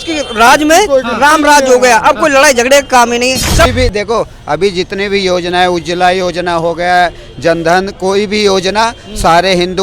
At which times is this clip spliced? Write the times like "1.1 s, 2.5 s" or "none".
3.7 s